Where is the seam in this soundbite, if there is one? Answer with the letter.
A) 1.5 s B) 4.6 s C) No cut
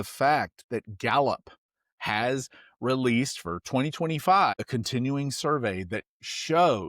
B